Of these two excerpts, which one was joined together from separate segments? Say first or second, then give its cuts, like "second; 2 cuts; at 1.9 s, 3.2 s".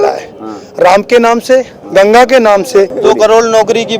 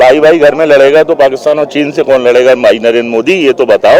first; 1 cut; at 2.9 s